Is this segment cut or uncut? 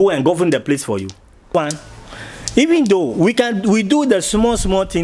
cut